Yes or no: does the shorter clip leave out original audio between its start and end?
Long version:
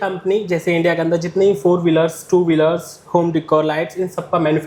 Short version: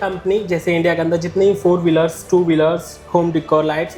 no